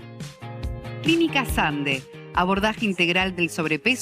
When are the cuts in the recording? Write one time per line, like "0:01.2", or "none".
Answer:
0:01.0